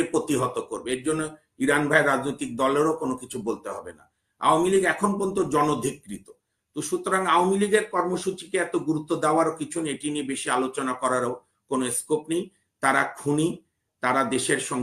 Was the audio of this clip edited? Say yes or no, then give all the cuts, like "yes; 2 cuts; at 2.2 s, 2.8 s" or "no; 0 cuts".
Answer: no; 0 cuts